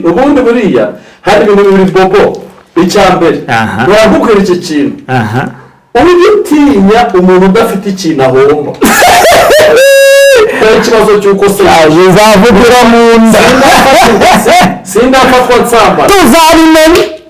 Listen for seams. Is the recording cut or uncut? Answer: cut